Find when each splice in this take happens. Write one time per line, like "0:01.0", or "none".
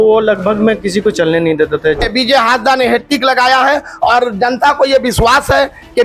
0:02.0